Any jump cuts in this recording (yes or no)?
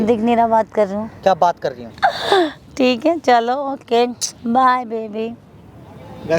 yes